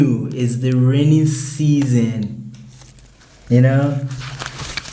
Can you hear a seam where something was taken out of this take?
no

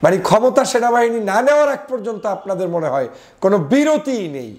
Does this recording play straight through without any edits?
yes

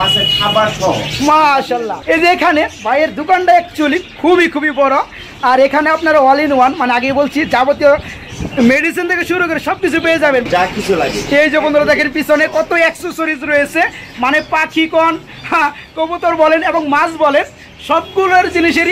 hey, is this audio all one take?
no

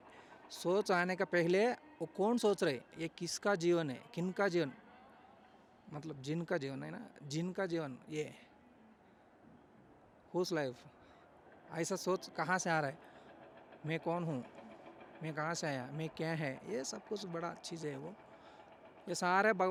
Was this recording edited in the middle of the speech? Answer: no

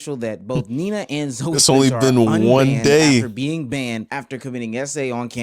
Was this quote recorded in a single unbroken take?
yes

